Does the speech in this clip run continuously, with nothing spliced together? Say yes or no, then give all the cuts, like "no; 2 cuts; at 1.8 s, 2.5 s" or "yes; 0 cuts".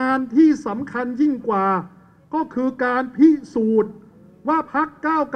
yes; 0 cuts